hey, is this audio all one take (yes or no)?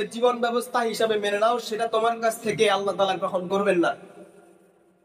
yes